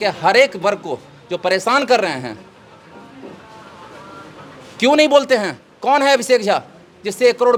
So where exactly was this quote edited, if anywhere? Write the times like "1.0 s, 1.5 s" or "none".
none

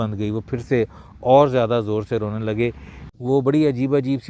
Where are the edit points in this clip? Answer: 3.1 s

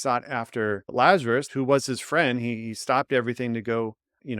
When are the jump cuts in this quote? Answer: 0.8 s, 1.5 s

